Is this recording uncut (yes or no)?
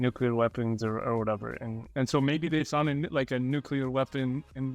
yes